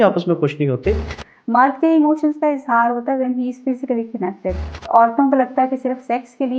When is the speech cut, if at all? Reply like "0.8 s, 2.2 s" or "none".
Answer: 1.0 s, 4.7 s